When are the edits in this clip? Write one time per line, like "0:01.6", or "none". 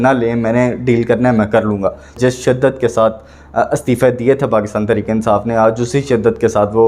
0:02.2